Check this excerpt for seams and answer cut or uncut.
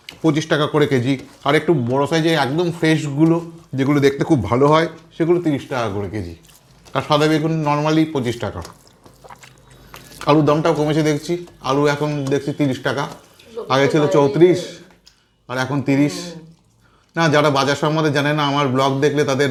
uncut